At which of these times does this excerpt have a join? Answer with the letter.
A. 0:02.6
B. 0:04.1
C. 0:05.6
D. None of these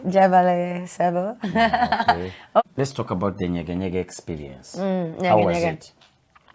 A